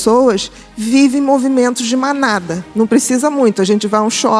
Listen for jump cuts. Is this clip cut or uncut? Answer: cut